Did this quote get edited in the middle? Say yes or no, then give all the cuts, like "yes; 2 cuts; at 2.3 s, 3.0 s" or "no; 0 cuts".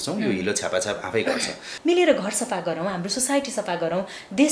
yes; 1 cut; at 1.6 s